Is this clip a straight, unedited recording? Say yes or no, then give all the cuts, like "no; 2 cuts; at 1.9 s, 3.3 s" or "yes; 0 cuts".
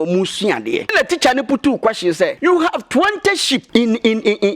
no; 3 cuts; at 0.9 s, 2.4 s, 3.6 s